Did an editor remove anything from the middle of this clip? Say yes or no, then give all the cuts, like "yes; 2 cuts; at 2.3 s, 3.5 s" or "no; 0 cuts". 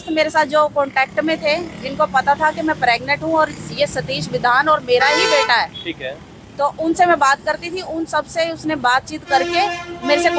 no; 0 cuts